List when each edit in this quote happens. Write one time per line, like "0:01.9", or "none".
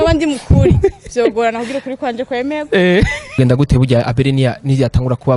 0:03.4